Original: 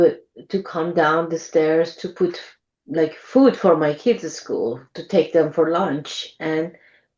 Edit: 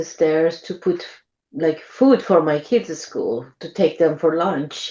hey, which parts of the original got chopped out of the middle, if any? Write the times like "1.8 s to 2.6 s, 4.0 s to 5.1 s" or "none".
none